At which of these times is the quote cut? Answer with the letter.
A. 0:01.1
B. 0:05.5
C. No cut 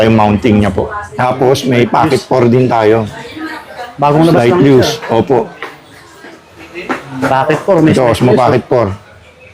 A